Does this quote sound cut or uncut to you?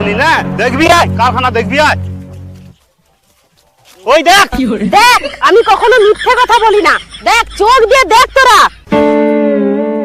uncut